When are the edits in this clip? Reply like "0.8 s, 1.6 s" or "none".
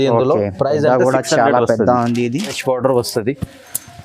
2.6 s